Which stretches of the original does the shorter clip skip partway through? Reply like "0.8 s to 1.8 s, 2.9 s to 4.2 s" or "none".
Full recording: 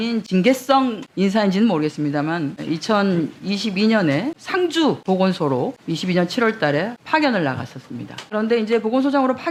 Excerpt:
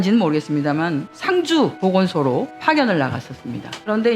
2.6 s to 4.4 s, 5.8 s to 7.0 s

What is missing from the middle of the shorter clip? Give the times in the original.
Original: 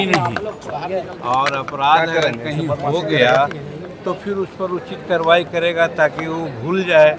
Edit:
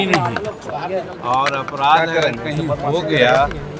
none

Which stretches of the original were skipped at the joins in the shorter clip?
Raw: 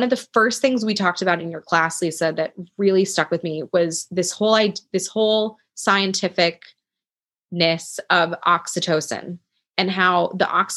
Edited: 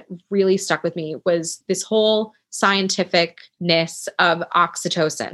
4.0 s to 4.8 s, 6.7 s to 7.4 s

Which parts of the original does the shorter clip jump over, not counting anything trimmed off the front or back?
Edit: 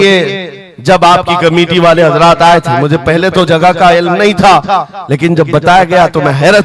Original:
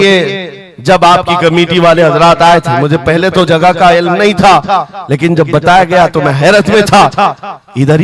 none

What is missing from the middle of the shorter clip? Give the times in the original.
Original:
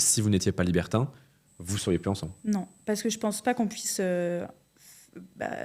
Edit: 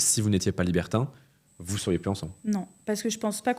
none

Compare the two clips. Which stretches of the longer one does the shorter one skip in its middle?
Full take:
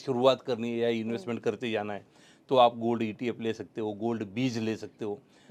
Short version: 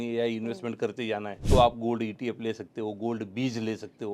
2.0 s to 2.3 s

